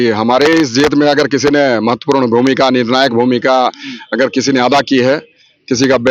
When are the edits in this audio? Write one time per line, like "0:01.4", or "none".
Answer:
none

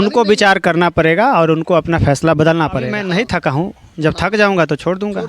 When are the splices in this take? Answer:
0:03.0

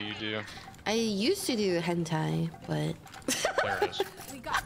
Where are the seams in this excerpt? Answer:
none

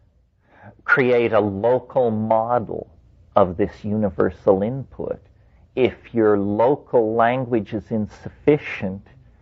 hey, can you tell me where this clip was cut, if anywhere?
none

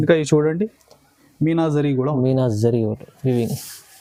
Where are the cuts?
none

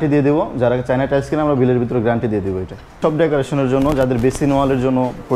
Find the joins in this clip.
0:02.9

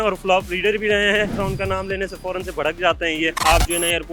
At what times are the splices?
0:01.3
0:03.4

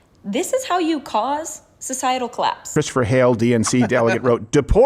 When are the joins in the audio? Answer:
0:02.7

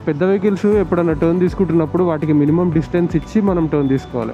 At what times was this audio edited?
none

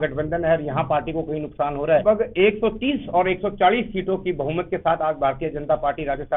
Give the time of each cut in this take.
0:02.0

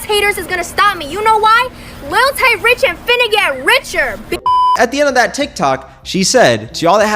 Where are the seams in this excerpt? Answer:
0:04.7

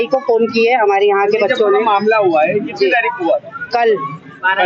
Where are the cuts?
none

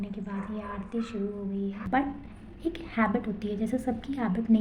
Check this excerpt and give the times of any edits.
0:01.8

